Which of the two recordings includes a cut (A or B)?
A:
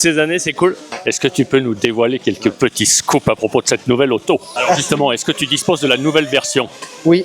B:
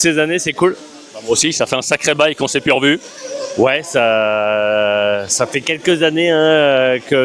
A